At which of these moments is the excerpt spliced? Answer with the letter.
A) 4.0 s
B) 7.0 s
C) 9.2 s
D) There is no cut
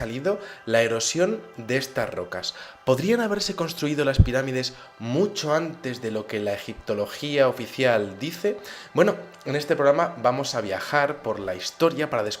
A